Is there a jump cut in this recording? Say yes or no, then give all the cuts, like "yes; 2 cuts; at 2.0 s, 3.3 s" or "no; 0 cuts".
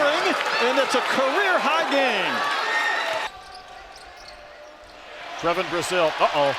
yes; 1 cut; at 3.3 s